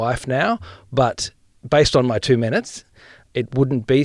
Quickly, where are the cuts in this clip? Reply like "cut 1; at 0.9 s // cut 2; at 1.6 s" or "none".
cut 1; at 1.5 s